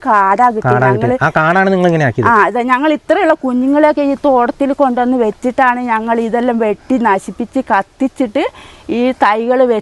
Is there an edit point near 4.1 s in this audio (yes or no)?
no